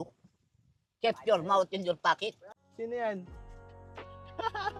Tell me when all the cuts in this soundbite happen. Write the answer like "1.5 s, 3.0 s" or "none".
2.5 s